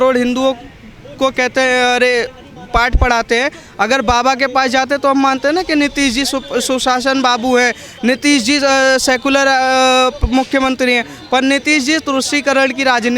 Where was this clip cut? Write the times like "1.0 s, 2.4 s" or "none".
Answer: none